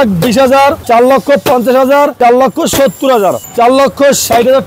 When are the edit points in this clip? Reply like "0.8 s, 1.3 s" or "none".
0.8 s, 2.1 s, 3.4 s